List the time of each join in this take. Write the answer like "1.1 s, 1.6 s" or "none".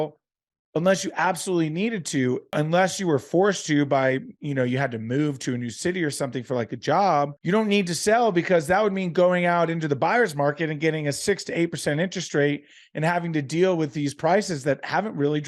2.5 s, 7.4 s